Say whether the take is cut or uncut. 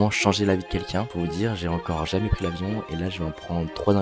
cut